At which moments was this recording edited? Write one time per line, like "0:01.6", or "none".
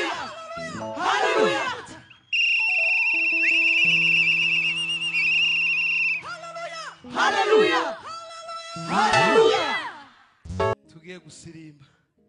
0:10.7